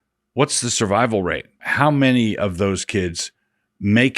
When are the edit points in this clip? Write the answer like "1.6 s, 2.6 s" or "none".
1.6 s